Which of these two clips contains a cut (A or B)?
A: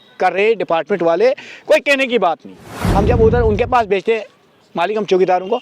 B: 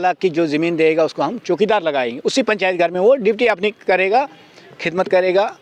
A